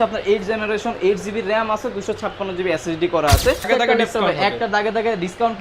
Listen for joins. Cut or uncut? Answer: cut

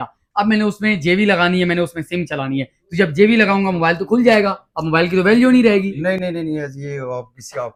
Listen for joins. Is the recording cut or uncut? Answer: uncut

